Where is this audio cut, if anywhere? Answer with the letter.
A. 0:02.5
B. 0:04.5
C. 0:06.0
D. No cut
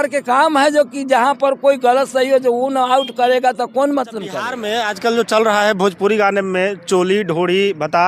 B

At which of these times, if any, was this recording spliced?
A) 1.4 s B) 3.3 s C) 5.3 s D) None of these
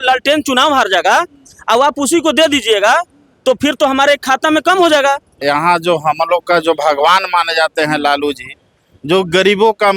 C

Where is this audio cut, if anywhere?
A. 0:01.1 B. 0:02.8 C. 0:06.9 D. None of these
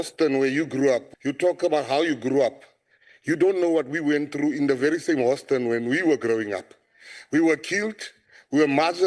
A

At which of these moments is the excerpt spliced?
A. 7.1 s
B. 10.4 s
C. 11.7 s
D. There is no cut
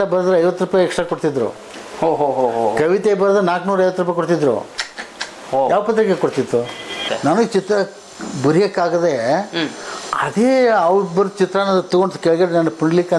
A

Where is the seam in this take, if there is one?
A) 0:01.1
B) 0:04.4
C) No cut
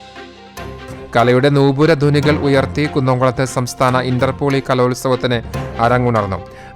A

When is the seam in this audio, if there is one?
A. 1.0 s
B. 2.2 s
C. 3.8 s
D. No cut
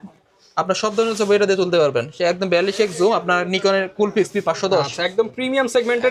D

